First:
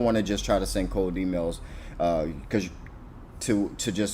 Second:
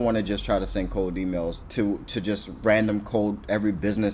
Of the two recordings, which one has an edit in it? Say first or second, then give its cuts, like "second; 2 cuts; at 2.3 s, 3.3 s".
second; 1 cut; at 1.6 s